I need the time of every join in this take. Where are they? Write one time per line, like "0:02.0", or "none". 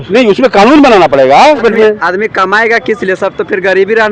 0:01.6